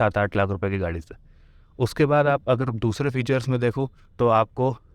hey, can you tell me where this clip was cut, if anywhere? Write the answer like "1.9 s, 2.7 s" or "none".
none